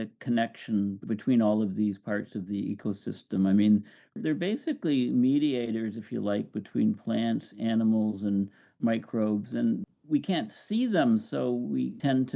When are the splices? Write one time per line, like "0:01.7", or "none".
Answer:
0:04.2